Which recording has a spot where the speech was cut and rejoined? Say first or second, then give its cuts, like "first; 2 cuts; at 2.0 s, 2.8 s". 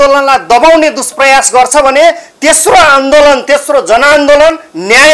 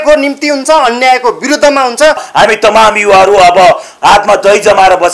second; 1 cut; at 2.3 s